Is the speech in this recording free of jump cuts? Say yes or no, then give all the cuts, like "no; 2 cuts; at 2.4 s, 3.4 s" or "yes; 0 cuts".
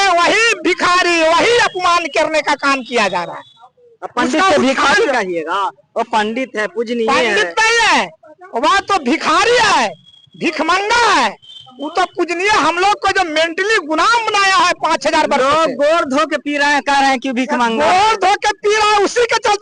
yes; 0 cuts